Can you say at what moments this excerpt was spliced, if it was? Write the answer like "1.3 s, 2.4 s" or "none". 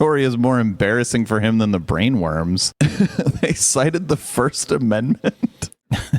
2.7 s